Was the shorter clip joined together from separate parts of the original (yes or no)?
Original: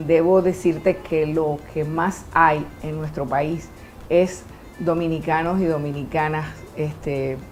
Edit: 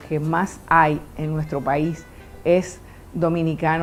no